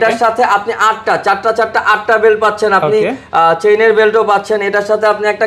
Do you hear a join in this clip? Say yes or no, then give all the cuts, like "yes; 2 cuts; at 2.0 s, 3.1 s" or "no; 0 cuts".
no; 0 cuts